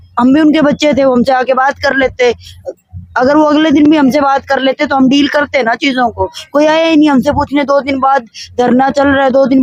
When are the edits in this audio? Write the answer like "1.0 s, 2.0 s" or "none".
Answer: none